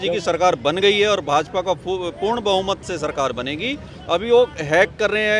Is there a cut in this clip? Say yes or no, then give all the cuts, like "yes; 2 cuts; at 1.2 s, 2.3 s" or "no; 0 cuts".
no; 0 cuts